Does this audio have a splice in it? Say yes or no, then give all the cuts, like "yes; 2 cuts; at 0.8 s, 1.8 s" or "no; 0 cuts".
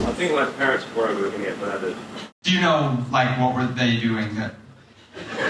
yes; 1 cut; at 2.3 s